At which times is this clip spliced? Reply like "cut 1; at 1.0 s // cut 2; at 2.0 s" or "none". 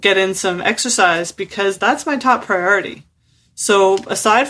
none